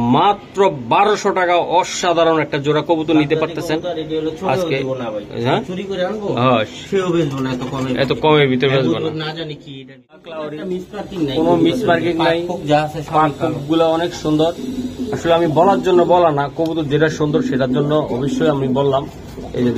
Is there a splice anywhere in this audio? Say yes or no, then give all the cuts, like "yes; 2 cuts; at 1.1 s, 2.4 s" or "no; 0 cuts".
yes; 1 cut; at 10.2 s